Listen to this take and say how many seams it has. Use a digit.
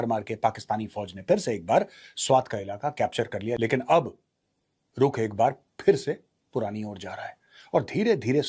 0